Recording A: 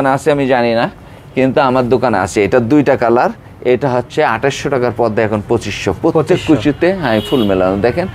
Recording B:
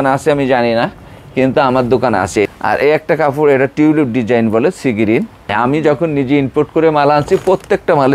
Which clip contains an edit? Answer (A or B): B